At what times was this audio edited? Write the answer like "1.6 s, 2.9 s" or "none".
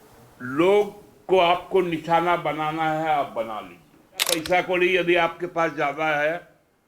4.4 s